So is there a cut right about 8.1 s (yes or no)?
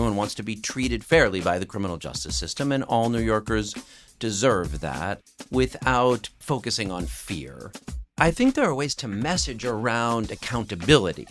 yes